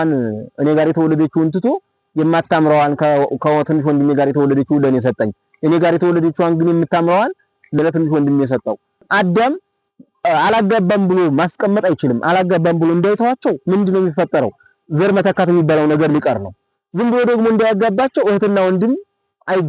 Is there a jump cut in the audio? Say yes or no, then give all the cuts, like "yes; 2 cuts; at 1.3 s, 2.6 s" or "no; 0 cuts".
yes; 2 cuts; at 7.8 s, 9.1 s